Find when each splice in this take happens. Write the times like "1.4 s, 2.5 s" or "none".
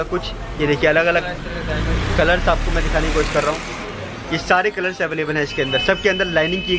none